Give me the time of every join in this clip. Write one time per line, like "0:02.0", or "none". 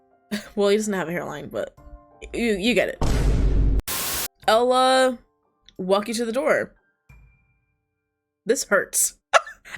0:03.8